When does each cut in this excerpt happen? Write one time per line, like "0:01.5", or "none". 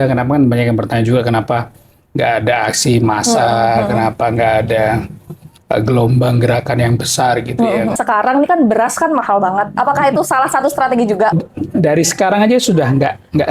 0:08.0
0:11.3